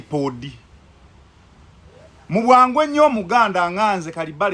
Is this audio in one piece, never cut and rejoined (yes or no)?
no